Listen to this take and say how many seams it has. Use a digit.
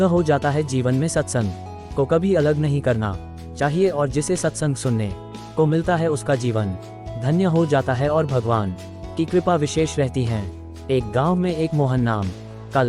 1